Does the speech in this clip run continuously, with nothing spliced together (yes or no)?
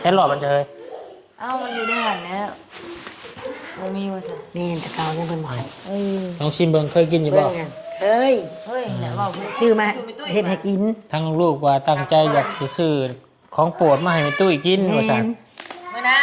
no